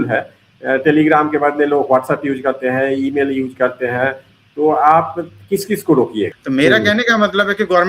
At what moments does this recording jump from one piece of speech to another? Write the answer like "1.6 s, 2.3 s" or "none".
6.4 s